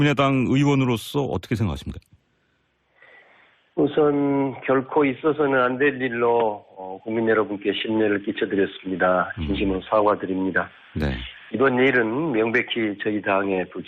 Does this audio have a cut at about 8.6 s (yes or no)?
yes